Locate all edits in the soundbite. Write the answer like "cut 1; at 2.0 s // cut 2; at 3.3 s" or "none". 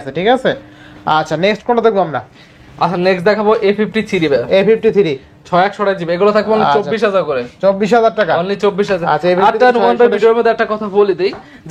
none

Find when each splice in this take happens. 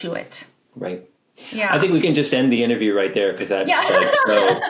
cut 1; at 2.0 s

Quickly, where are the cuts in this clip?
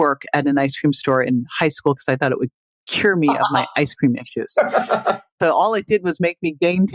cut 1; at 5.3 s

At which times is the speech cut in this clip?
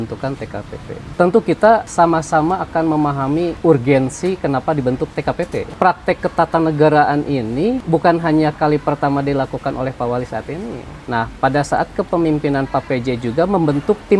cut 1; at 1.0 s // cut 2; at 1.9 s // cut 3; at 3.5 s // cut 4; at 5.7 s // cut 5; at 7.8 s // cut 6; at 10.9 s

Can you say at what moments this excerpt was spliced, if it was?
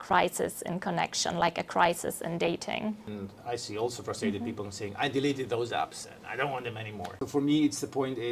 cut 1; at 3.1 s // cut 2; at 7.1 s

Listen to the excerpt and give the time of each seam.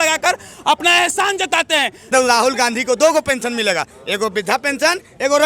cut 1; at 2.1 s

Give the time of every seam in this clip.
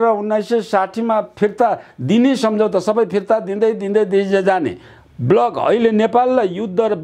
none

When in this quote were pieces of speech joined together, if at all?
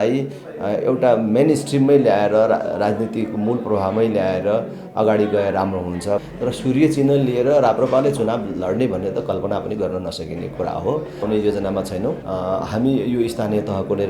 cut 1; at 6.3 s // cut 2; at 11.2 s // cut 3; at 12.2 s

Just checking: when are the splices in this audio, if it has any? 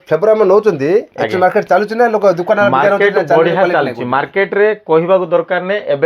none

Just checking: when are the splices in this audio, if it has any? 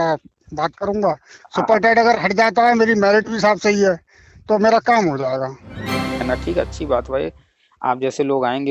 cut 1; at 6.2 s

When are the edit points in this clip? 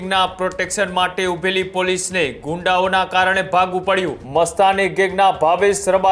cut 1; at 4.2 s

